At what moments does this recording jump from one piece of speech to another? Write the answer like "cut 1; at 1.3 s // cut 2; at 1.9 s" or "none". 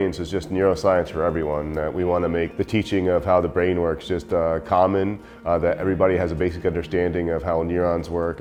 none